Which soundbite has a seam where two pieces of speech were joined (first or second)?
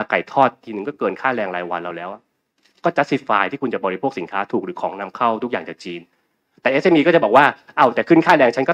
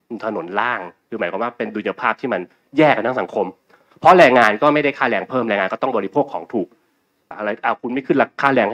second